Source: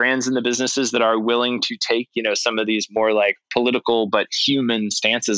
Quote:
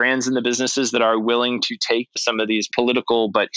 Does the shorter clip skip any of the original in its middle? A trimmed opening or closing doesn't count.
yes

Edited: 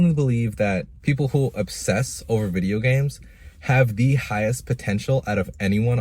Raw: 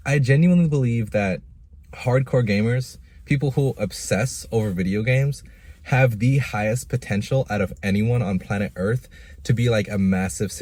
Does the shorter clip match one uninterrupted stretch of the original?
no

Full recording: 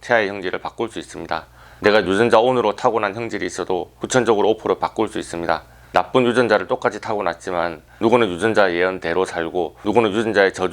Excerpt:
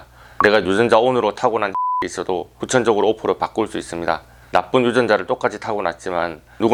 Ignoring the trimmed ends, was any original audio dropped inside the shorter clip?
no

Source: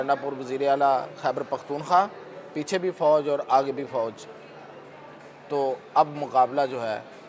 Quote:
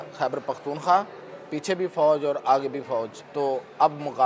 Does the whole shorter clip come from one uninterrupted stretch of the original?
no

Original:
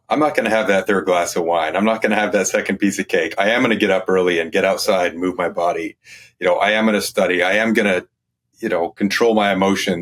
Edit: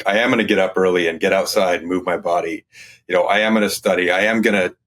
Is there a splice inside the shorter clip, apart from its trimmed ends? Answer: no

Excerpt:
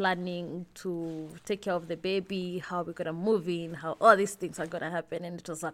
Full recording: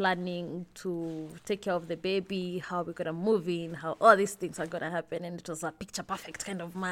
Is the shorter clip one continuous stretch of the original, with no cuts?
yes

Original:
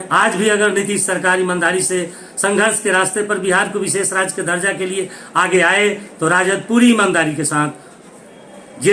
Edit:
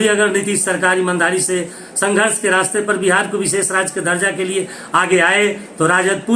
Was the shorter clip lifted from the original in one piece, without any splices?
yes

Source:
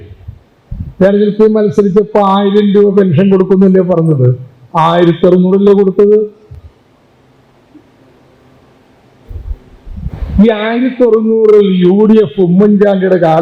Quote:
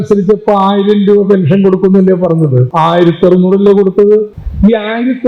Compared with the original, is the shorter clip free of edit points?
no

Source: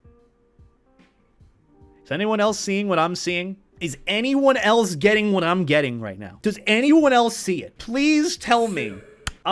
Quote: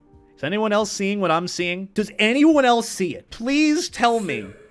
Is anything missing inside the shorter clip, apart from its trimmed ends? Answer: yes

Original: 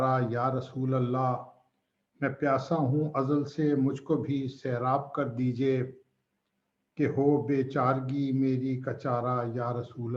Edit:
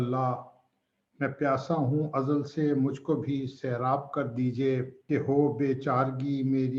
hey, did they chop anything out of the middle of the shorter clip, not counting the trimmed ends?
yes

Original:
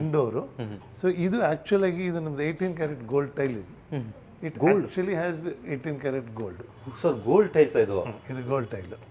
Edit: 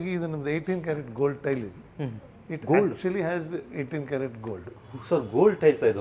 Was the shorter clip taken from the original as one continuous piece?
yes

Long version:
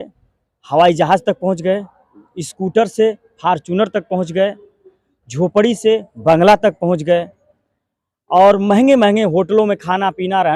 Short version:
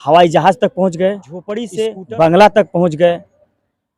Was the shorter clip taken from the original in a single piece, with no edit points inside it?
no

